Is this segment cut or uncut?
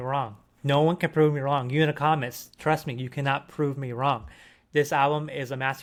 uncut